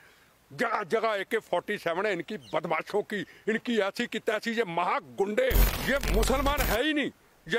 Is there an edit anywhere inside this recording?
yes; 1 cut; at 5.7 s

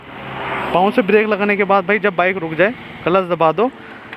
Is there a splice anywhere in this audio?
no; 0 cuts

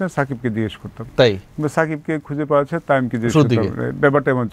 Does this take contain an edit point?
no; 0 cuts

